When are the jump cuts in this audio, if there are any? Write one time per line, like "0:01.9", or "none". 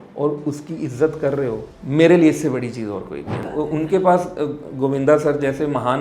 0:01.7
0:03.4